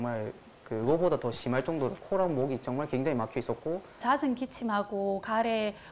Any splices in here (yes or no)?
yes